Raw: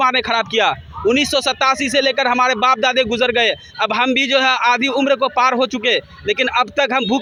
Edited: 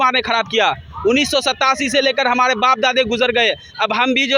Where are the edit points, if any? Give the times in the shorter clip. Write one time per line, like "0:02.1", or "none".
none